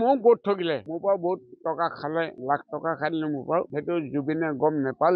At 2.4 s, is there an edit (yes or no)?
yes